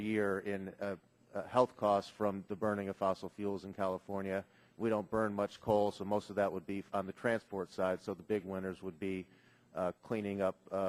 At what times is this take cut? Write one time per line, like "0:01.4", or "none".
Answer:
none